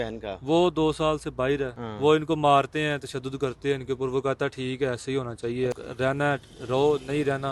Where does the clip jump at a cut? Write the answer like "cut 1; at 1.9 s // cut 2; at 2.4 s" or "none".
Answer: cut 1; at 1.8 s // cut 2; at 5.7 s

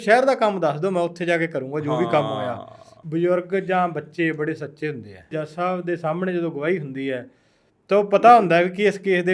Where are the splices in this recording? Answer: cut 1; at 2.9 s // cut 2; at 5.4 s

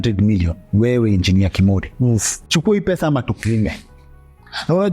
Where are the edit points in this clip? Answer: cut 1; at 2.4 s

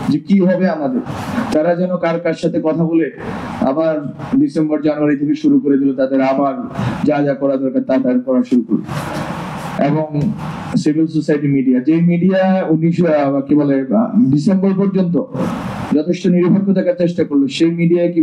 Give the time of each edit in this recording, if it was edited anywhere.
none

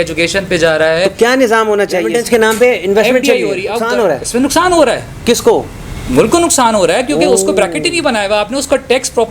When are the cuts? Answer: cut 1; at 2.2 s // cut 2; at 3.8 s

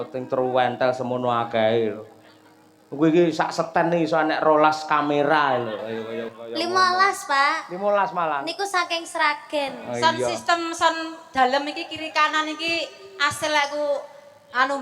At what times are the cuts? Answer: cut 1; at 6.3 s // cut 2; at 9.8 s

